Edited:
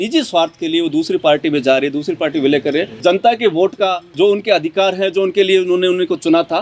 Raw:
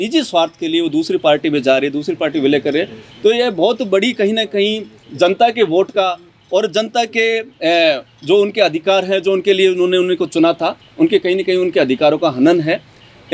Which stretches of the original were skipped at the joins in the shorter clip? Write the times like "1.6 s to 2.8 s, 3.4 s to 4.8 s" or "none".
2.9 s to 5.1 s, 6.2 s to 8.1 s